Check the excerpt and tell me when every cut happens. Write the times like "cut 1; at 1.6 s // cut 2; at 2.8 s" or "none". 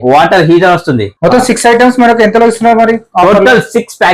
cut 1; at 1.1 s